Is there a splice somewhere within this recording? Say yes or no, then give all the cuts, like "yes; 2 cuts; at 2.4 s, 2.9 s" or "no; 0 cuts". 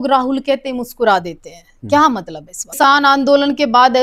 yes; 1 cut; at 2.8 s